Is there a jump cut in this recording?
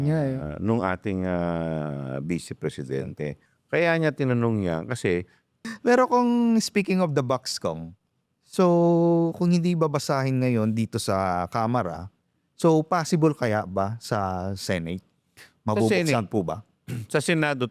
yes; 2 cuts; at 3.5 s, 5.6 s

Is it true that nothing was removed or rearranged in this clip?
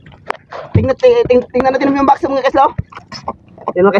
no; 1 cut; at 3.0 s

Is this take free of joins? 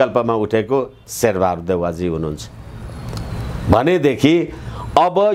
yes; 0 cuts

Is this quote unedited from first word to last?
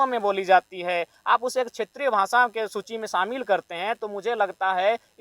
yes; 0 cuts

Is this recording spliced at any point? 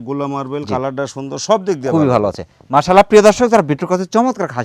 no; 0 cuts

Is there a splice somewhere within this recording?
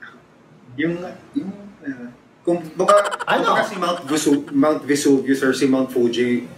no; 0 cuts

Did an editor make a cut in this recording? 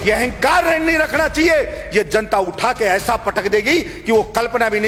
no; 0 cuts

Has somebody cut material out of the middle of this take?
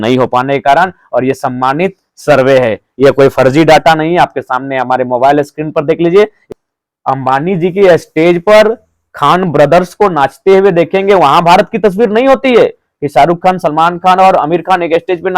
yes; 1 cut; at 6.5 s

